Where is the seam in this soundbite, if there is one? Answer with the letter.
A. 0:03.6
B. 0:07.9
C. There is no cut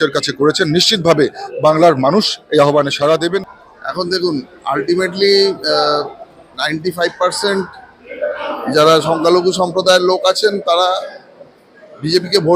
A